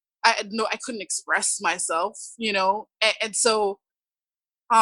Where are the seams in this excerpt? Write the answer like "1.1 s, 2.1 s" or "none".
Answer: none